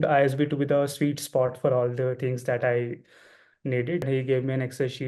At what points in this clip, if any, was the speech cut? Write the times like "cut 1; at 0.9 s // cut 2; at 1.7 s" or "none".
cut 1; at 4.1 s